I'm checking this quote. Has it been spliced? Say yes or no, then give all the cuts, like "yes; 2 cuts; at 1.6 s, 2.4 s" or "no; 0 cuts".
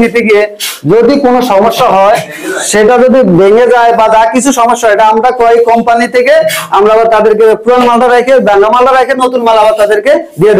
no; 0 cuts